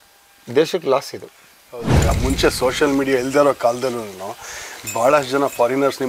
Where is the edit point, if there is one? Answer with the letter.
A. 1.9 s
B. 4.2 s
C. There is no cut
A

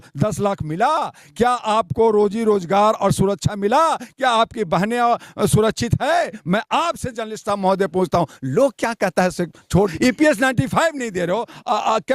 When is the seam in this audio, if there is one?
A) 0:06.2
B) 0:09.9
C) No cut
B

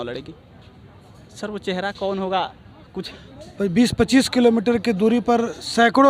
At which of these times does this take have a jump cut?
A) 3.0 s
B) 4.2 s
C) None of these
A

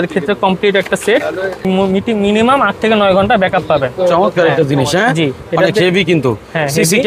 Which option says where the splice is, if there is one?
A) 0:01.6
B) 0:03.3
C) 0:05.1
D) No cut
A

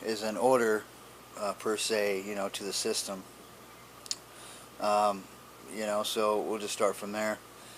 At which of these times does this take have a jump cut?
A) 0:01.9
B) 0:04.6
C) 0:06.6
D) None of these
C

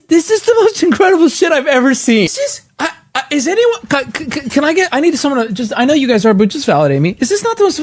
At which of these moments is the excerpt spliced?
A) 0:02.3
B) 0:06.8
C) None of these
A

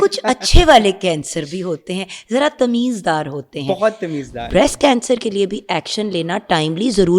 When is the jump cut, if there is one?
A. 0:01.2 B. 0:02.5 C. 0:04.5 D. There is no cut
C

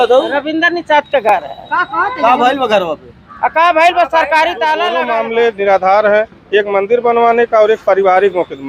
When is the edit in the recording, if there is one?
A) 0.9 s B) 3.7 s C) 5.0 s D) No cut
C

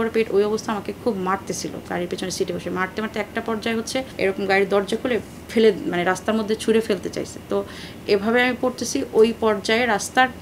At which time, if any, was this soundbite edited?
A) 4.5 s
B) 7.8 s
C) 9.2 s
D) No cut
D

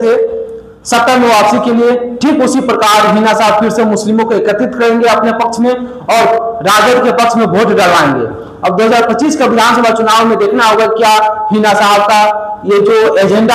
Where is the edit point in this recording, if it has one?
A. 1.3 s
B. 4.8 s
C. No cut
C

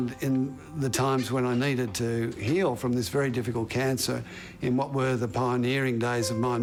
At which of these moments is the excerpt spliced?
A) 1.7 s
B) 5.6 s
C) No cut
C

